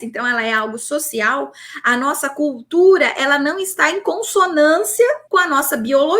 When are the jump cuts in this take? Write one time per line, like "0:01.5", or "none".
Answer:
0:05.2